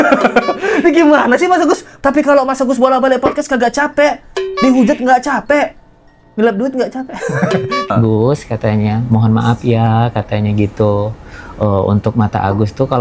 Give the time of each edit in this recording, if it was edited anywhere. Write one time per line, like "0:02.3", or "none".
0:01.9
0:07.9